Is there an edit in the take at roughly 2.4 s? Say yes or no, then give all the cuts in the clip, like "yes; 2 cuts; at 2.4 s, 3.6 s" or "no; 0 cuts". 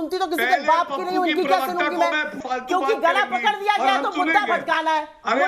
yes; 1 cut; at 2.4 s